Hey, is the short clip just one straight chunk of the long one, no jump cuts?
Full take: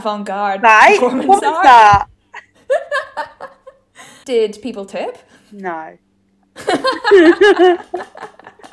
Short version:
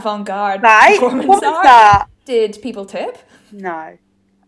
no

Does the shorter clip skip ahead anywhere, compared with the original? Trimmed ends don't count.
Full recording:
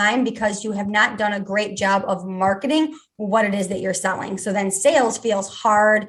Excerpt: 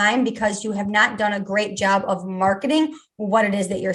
no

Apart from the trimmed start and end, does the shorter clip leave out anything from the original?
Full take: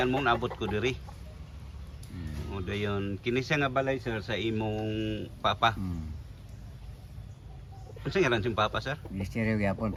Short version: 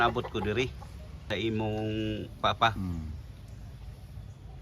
yes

